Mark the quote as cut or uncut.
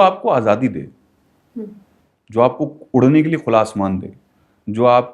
uncut